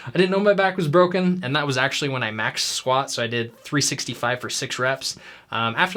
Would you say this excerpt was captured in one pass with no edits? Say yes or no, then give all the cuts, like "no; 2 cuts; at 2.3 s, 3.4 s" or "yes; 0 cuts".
yes; 0 cuts